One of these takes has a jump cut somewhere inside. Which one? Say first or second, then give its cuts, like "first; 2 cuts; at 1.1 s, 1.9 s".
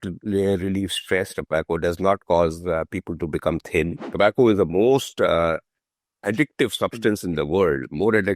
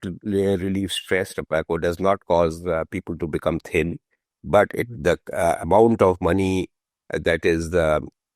first; 1 cut; at 4.0 s